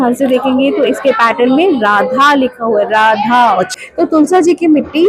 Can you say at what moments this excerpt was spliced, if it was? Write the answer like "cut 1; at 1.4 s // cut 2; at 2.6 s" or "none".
cut 1; at 3.7 s